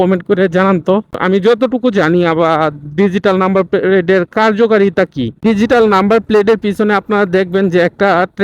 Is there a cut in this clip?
yes; 1 cut; at 1.2 s

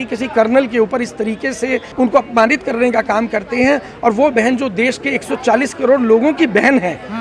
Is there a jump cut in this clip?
yes; 1 cut; at 1.9 s

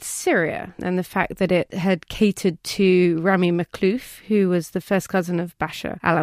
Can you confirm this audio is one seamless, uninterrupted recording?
yes; 0 cuts

